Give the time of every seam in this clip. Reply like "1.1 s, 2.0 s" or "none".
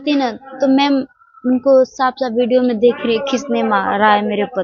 none